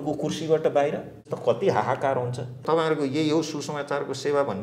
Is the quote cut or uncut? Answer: cut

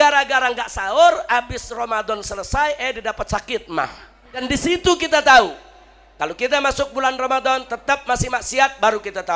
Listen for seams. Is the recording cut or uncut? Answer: cut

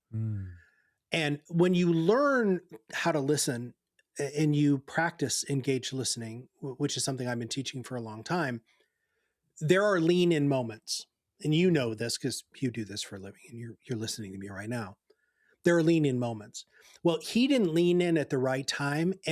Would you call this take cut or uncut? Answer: cut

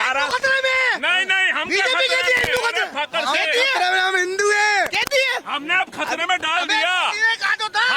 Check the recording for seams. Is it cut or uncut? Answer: uncut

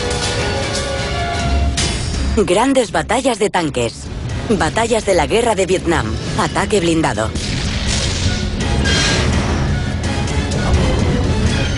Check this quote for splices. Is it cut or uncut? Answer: cut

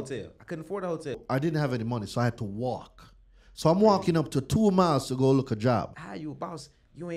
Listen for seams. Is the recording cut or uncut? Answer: cut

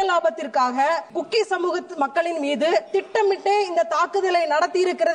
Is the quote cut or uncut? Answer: cut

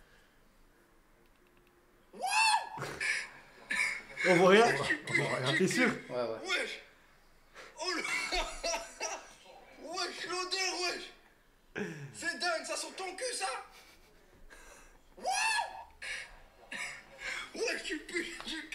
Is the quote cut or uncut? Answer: uncut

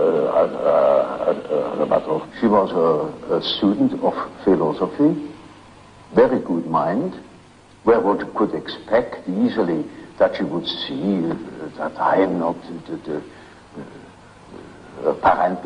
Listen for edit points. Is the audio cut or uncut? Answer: uncut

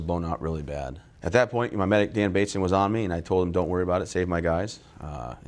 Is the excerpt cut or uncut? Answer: cut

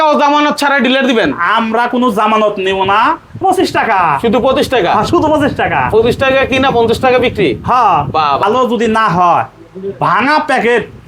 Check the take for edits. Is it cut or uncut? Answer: cut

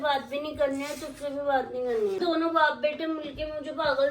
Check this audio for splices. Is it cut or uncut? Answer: cut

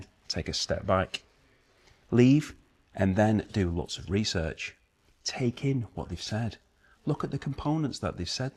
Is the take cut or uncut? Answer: uncut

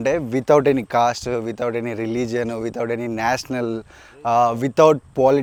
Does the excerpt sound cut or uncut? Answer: uncut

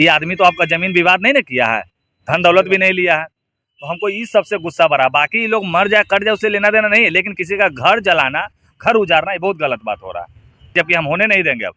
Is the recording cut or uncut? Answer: cut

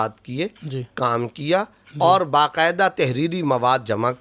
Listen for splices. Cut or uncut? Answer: uncut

